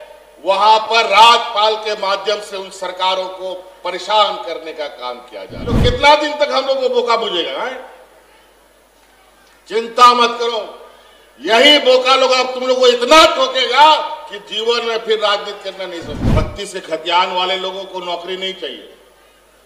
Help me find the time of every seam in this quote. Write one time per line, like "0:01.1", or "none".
0:05.8
0:16.3